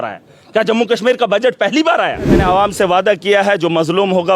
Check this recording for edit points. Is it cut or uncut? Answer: cut